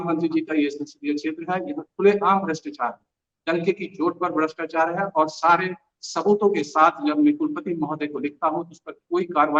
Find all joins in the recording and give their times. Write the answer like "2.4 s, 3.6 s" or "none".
none